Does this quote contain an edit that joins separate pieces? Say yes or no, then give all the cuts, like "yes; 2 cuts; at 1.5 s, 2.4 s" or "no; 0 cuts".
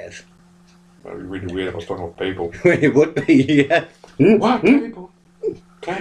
yes; 1 cut; at 4.0 s